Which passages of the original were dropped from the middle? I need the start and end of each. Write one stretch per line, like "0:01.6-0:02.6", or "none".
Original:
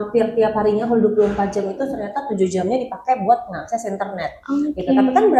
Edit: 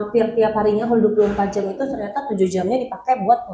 none